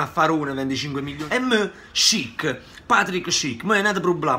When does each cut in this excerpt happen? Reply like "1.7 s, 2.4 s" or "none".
1.1 s